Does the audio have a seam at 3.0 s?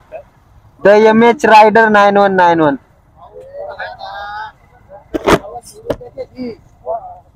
no; 0 cuts

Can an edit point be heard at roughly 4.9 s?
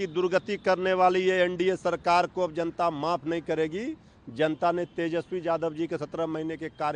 no; 0 cuts

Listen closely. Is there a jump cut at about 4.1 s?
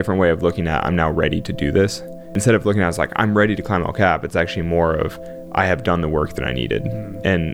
no; 1 cut; at 2.4 s

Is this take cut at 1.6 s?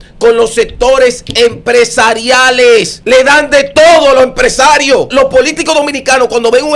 no; 2 cuts; at 2.9 s, 5.1 s

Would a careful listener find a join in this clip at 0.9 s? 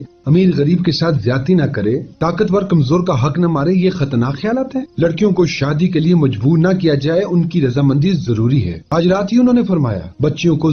no; 0 cuts

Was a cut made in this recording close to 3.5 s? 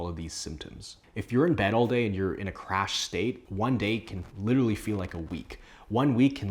no; 1 cut; at 1.1 s

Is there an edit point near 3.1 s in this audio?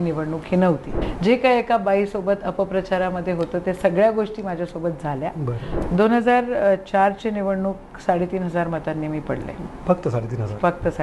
no; 2 cuts; at 1.0 s, 5.7 s

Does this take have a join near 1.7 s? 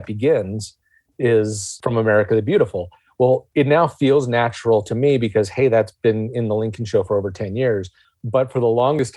yes; 1 cut; at 1.7 s

